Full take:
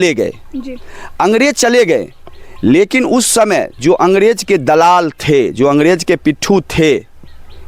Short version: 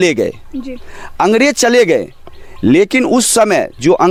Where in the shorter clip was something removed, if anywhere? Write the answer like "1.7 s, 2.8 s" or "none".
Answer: none